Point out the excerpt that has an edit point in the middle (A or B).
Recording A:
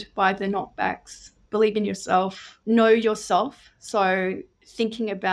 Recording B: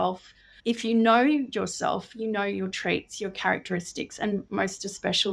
A